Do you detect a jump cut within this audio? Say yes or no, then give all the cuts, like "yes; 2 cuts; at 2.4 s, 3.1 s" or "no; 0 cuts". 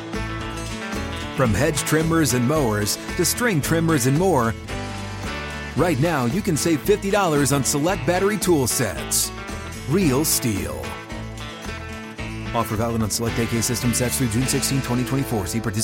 no; 0 cuts